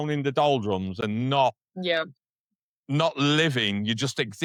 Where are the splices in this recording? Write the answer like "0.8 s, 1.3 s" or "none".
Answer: none